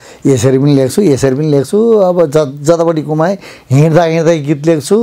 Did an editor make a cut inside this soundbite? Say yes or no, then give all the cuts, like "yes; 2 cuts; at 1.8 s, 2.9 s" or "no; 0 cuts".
no; 0 cuts